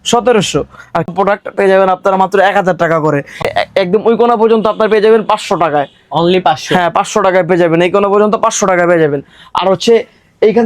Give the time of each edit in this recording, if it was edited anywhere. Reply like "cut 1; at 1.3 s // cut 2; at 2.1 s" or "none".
cut 1; at 1.1 s // cut 2; at 3.5 s

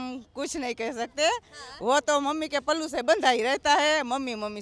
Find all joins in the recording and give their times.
none

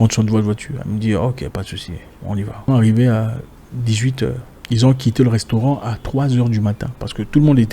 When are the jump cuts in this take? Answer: cut 1; at 2.7 s // cut 2; at 4.5 s

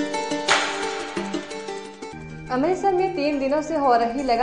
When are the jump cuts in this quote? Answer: cut 1; at 1.7 s

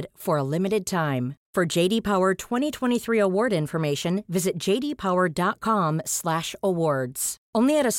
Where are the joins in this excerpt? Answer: none

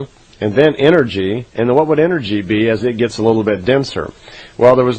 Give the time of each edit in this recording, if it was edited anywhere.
cut 1; at 2.8 s

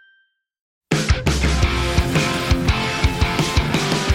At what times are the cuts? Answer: cut 1; at 0.9 s

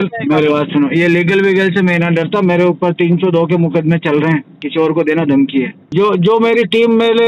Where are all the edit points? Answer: cut 1; at 4.6 s // cut 2; at 5.8 s

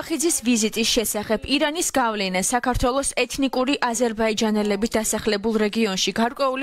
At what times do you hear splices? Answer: none

